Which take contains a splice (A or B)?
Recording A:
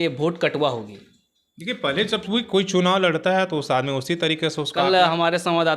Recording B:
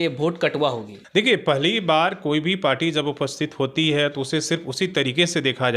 B